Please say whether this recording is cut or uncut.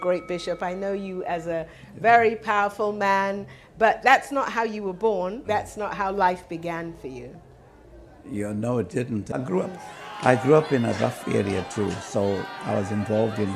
cut